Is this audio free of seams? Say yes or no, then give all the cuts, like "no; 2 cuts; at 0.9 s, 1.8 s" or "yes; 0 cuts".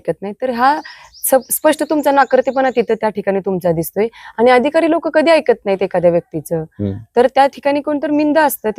yes; 0 cuts